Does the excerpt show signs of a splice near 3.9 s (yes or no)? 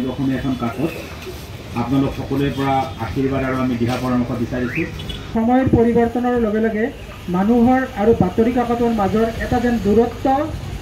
no